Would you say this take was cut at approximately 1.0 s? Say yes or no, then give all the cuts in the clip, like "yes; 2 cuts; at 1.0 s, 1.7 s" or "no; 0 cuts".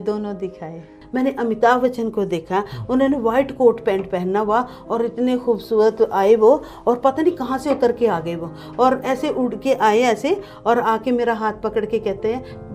yes; 1 cut; at 1.0 s